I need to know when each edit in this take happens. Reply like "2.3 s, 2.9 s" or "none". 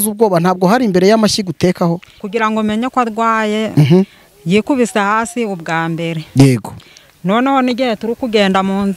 2.1 s